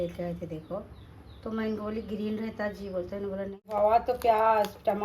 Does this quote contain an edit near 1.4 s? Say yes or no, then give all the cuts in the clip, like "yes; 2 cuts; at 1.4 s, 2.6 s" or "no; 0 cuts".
no; 1 cut; at 3.7 s